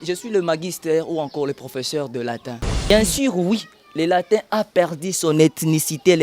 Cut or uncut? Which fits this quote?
cut